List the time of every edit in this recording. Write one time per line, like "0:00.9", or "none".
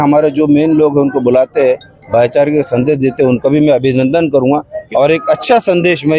0:04.8